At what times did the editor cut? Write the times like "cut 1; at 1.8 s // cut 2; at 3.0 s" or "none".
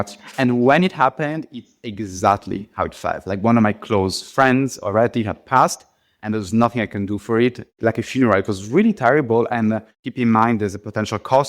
cut 1; at 7.7 s // cut 2; at 9.9 s